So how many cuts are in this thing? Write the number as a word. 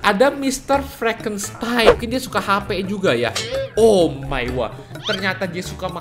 one